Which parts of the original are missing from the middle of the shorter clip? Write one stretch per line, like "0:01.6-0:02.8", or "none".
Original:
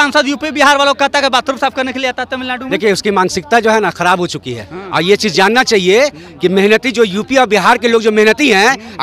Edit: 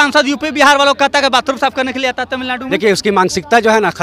none